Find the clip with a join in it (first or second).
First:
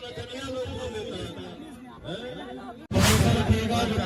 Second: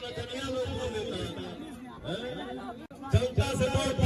first